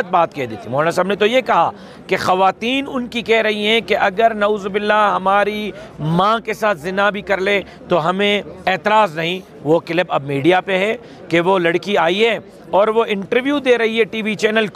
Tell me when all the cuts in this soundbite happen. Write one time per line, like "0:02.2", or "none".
none